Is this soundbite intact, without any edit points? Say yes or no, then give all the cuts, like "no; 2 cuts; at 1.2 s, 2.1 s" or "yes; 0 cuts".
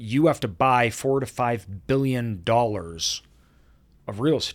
yes; 0 cuts